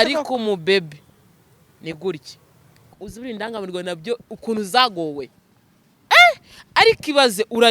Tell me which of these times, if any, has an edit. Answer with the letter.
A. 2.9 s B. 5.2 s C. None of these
A